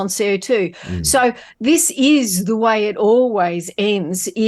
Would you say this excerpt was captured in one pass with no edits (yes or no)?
yes